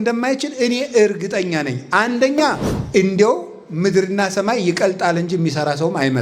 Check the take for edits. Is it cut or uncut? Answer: cut